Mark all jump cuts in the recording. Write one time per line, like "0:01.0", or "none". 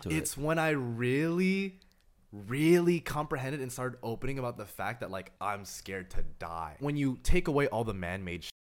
0:05.3
0:06.8